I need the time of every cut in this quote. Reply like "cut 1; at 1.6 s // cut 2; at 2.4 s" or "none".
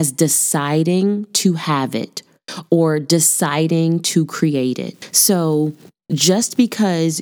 cut 1; at 5.0 s